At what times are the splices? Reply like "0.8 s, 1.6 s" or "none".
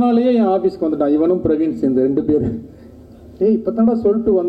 none